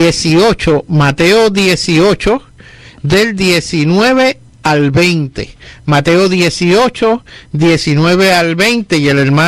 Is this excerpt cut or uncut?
uncut